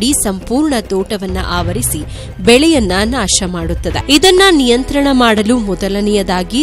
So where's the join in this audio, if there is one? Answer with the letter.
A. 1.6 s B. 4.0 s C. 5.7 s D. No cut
B